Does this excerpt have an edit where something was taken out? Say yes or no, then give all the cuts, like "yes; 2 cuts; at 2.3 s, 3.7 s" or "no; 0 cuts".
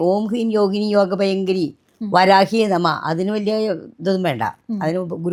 no; 0 cuts